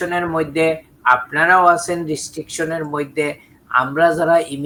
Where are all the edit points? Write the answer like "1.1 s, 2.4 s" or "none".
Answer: none